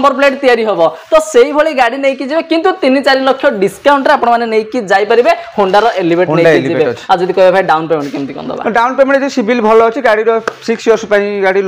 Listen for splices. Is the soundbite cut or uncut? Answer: uncut